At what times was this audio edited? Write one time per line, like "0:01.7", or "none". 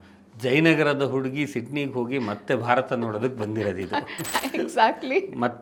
none